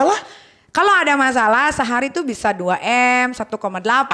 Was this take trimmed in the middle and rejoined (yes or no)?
no